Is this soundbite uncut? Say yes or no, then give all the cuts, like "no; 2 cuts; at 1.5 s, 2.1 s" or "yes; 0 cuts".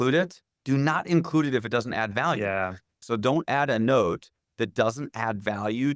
no; 1 cut; at 3.0 s